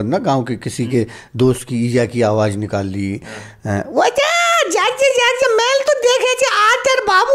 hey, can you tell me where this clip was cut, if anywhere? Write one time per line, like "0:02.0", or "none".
none